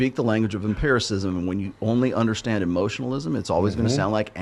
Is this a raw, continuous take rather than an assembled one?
yes; 0 cuts

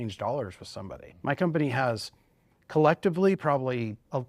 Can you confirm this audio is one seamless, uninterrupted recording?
no; 1 cut; at 1.0 s

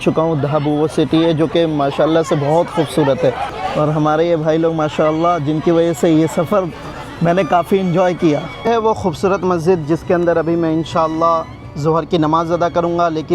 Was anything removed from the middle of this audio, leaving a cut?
yes; 2 cuts; at 3.5 s, 8.7 s

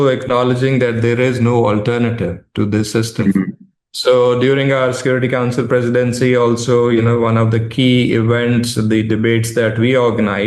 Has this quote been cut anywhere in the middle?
no; 0 cuts

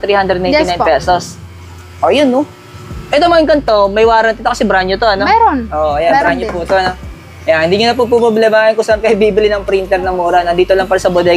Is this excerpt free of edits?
yes; 0 cuts

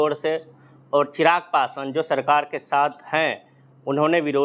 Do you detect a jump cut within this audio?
no; 0 cuts

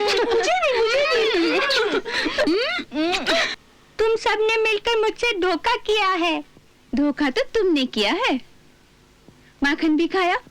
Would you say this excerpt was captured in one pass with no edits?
yes; 0 cuts

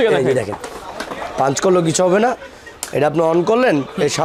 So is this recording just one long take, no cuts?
yes; 0 cuts

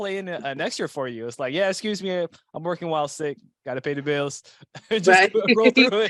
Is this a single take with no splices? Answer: yes; 0 cuts

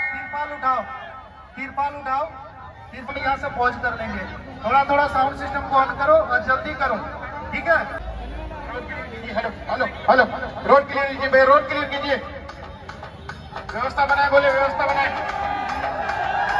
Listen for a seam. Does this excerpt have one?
yes; 2 cuts; at 3.1 s, 8.0 s

